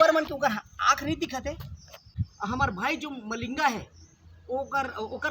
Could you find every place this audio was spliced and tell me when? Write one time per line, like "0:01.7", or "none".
0:02.1